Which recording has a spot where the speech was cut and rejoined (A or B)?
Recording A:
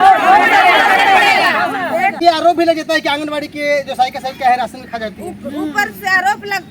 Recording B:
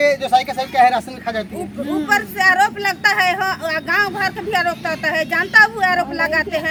A